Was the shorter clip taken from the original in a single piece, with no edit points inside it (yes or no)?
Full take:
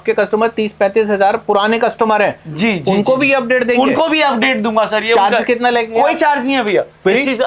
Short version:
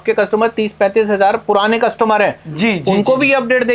yes